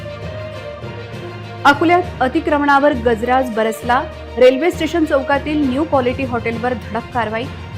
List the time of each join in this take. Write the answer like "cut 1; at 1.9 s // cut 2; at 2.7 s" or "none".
cut 1; at 1.0 s